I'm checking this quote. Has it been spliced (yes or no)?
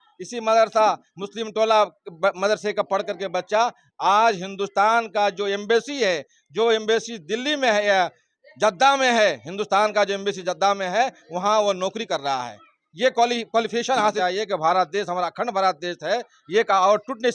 yes